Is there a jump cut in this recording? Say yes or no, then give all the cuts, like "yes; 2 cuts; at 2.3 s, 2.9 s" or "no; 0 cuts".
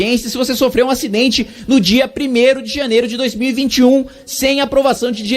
no; 0 cuts